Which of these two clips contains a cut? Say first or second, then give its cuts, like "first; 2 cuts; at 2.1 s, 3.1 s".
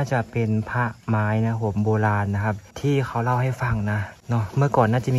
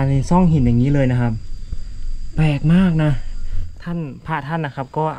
first; 2 cuts; at 2.7 s, 4.1 s